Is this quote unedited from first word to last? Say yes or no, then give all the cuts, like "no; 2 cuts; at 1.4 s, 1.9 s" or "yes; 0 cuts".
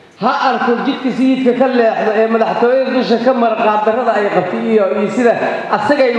yes; 0 cuts